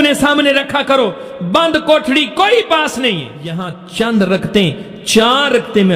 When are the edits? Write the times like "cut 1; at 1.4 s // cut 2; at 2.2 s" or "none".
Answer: cut 1; at 3.8 s